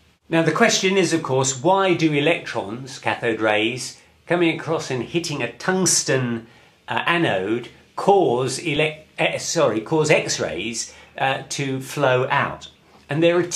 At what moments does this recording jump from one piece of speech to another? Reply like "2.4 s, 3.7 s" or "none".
none